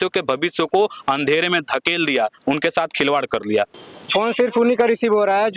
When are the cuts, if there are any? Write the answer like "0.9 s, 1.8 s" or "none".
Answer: 3.8 s

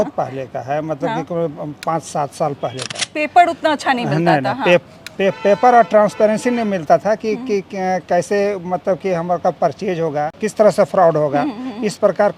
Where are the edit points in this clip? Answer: 2.9 s, 10.3 s

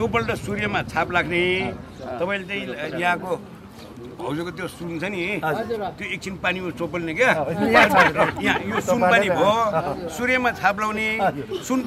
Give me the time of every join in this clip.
none

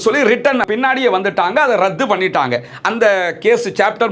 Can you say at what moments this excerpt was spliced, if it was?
none

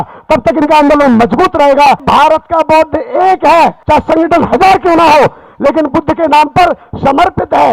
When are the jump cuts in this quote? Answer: 2.0 s, 3.8 s

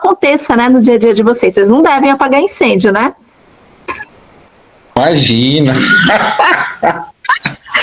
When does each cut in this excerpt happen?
none

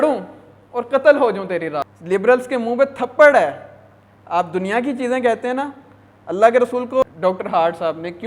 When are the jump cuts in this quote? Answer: 1.9 s, 7.0 s

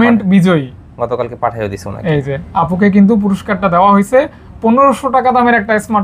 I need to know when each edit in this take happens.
none

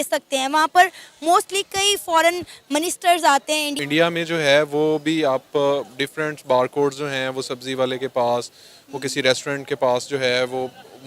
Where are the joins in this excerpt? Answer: 3.8 s

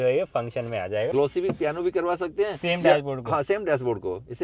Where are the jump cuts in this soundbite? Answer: 1.1 s

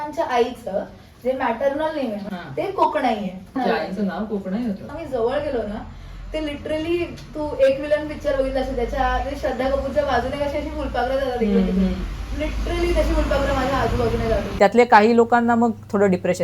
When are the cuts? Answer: 2.2 s, 3.5 s, 4.9 s, 14.5 s

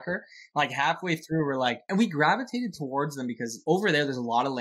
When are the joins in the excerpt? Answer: 1.8 s, 3.5 s

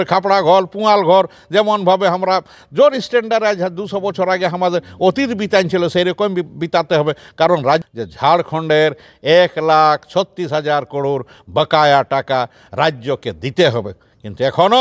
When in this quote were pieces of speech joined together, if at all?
7.8 s

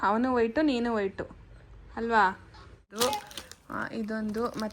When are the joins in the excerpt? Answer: 2.9 s

